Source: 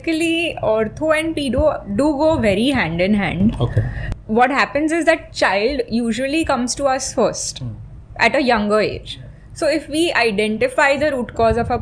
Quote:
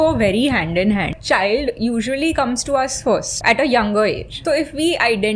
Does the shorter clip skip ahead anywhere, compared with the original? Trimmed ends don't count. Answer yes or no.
yes